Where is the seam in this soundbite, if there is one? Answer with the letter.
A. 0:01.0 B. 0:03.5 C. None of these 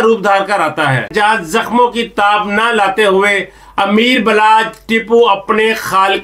A